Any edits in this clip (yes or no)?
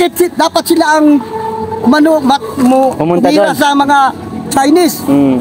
no